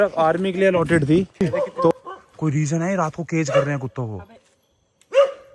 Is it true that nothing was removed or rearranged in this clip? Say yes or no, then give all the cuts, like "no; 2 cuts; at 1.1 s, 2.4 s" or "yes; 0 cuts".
no; 1 cut; at 1.9 s